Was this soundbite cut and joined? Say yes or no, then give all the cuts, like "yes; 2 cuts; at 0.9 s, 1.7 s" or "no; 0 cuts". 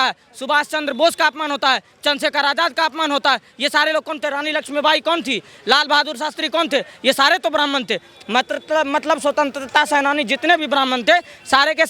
no; 0 cuts